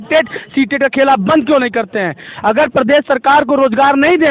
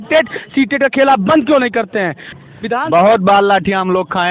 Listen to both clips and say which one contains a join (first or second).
second